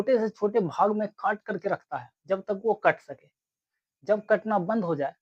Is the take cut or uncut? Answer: uncut